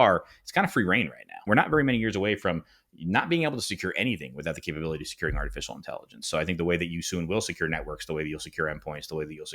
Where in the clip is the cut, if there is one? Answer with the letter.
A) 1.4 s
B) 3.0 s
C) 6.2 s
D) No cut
A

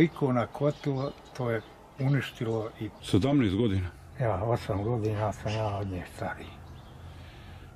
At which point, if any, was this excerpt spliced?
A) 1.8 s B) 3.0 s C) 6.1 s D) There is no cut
B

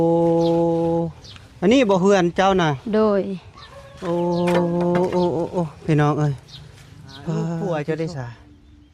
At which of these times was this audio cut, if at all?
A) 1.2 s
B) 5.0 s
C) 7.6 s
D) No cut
C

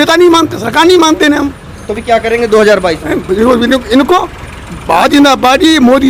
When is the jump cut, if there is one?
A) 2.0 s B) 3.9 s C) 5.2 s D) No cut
D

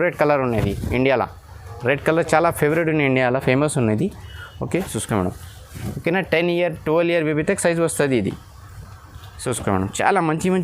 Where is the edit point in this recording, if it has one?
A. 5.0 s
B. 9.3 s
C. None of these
A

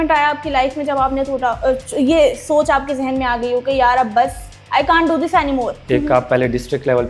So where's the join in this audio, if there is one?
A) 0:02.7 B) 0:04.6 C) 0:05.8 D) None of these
C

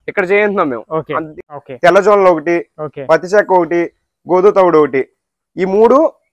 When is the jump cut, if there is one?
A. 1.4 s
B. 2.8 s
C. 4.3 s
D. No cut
A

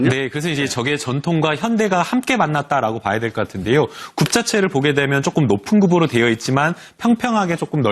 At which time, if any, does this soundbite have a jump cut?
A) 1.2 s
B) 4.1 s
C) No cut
A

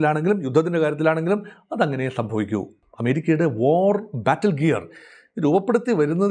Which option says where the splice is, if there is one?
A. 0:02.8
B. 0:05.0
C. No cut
A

